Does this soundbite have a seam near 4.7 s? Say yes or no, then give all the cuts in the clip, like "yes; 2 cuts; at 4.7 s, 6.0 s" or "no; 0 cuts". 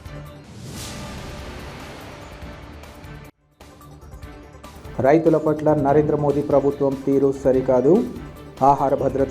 yes; 2 cuts; at 0.8 s, 4.7 s